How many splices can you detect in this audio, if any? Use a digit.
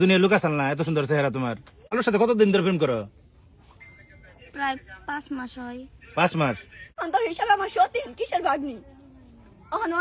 2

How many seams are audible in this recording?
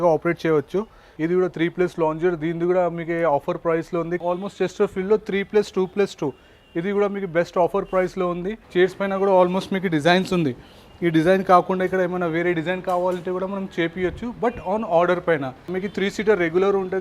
4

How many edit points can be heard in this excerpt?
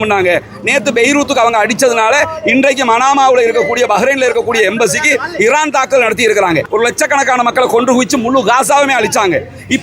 1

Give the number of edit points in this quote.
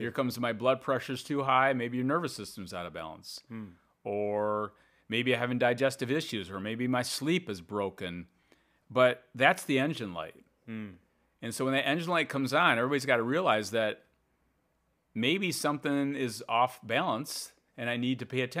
0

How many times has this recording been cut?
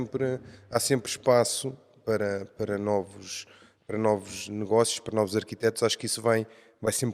0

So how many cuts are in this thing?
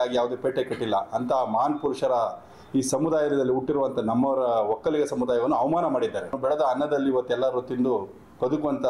1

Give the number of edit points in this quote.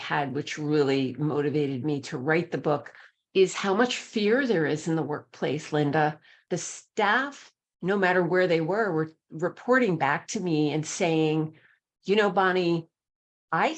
1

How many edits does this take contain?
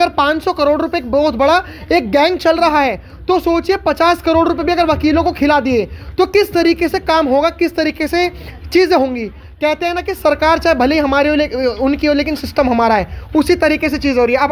0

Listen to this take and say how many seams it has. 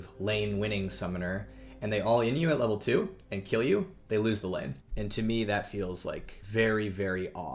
2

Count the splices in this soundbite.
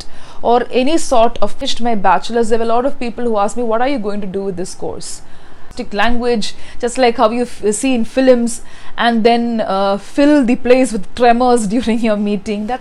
2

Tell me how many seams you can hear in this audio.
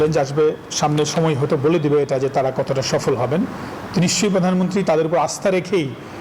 0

